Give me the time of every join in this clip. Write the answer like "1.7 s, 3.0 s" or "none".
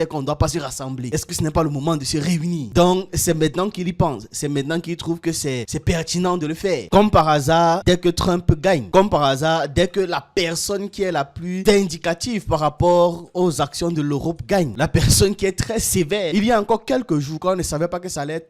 16.3 s